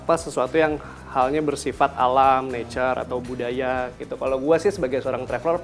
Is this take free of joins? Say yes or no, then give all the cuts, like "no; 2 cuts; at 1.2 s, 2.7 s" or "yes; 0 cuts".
yes; 0 cuts